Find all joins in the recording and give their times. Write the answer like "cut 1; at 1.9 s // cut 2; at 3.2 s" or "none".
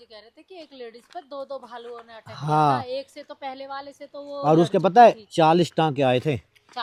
none